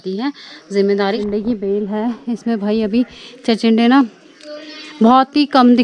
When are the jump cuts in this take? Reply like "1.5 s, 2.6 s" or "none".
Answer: 1.2 s